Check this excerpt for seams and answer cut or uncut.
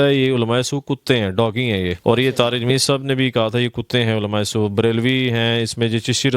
cut